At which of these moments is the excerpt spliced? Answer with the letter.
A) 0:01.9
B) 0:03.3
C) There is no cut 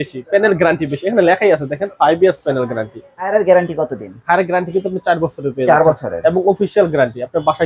B